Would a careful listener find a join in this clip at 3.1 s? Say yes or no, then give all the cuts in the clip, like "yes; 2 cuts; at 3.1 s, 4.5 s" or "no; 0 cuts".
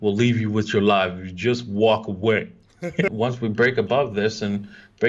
yes; 1 cut; at 3.1 s